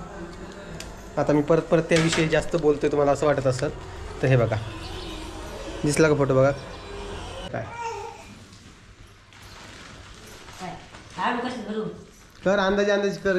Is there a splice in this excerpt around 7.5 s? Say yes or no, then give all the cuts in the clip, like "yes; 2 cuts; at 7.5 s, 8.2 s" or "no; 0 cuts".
yes; 1 cut; at 7.5 s